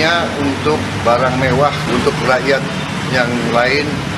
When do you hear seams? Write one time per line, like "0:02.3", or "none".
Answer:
0:01.8